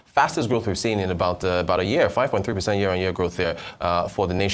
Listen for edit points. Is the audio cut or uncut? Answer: uncut